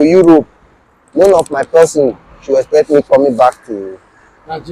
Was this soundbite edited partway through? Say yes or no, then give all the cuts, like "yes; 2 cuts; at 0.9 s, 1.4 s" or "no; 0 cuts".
no; 0 cuts